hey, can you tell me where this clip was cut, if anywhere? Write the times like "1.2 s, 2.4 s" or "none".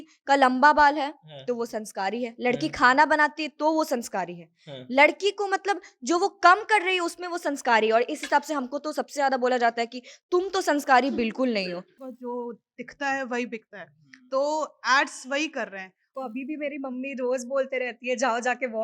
12.1 s, 16.1 s